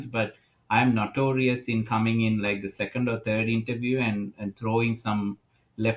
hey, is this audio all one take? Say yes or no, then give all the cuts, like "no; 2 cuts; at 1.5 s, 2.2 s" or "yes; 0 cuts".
yes; 0 cuts